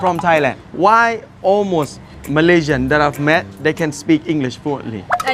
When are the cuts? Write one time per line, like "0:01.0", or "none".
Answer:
none